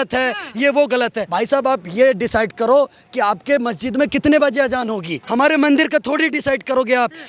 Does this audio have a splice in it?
yes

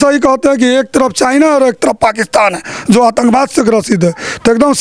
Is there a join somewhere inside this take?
no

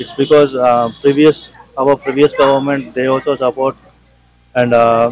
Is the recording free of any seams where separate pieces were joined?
yes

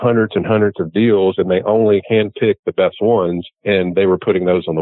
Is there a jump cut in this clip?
yes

